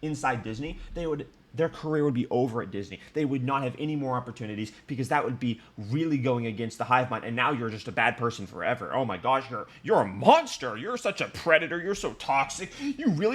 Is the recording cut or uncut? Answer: uncut